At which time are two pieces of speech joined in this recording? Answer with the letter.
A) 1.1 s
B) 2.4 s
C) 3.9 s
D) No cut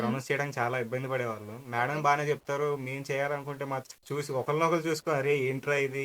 C